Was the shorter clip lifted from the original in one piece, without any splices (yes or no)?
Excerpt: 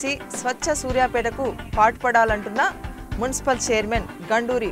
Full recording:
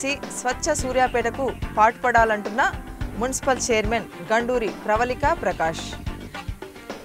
yes